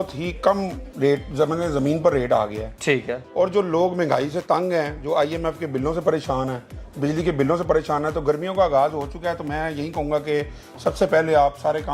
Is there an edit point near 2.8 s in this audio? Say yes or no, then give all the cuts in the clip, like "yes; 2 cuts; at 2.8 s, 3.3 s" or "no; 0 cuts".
no; 0 cuts